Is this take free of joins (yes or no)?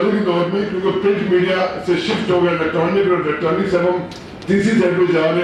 yes